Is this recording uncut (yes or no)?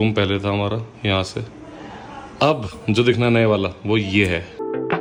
yes